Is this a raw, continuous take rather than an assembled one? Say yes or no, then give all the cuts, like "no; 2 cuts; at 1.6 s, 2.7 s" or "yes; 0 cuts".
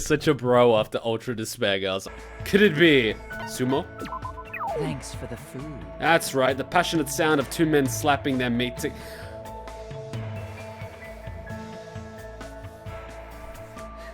no; 1 cut; at 2.1 s